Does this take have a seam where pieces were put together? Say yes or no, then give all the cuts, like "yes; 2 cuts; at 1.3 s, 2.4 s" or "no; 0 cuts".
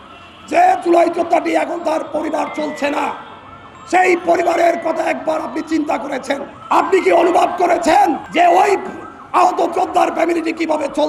no; 0 cuts